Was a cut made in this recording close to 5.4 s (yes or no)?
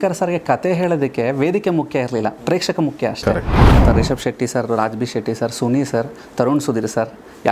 no